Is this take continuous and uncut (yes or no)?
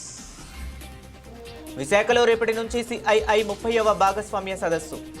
no